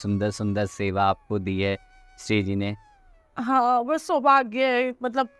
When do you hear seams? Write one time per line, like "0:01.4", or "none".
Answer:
none